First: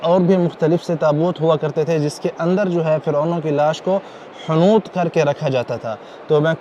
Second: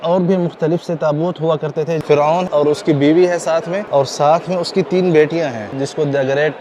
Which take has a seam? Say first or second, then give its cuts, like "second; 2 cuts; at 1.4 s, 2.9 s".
second; 3 cuts; at 2.4 s, 3.8 s, 5.7 s